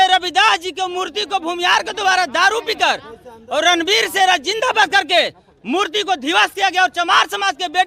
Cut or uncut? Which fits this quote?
uncut